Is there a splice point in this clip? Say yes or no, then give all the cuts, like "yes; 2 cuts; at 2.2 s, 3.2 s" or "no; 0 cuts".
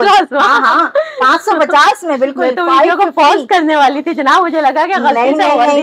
no; 0 cuts